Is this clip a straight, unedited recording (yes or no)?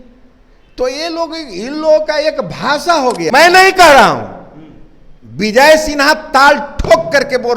no